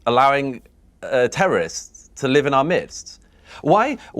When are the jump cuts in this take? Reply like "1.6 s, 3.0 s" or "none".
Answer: 3.1 s